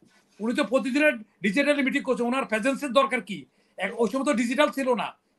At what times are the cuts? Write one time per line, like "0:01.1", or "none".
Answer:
none